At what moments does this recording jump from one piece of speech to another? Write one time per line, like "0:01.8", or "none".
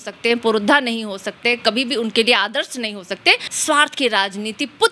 0:03.5